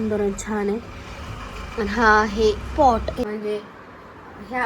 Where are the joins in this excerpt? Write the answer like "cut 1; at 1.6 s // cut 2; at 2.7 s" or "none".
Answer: cut 1; at 3.3 s